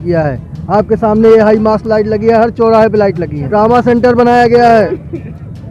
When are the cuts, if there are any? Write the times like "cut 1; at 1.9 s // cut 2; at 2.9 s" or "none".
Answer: cut 1; at 3.3 s